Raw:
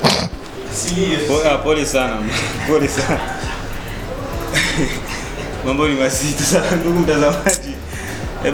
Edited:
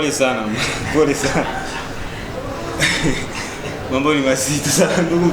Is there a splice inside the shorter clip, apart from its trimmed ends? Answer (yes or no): no